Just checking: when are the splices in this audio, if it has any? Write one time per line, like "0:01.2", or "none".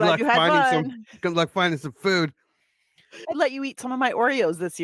0:03.2